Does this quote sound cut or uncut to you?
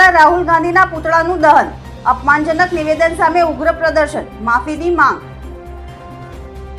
cut